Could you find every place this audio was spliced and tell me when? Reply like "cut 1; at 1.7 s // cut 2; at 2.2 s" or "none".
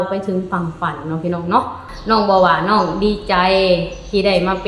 cut 1; at 1.9 s